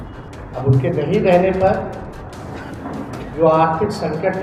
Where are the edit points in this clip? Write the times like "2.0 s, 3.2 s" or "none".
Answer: none